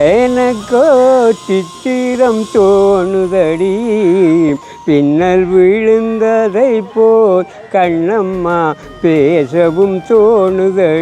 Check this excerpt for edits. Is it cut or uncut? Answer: uncut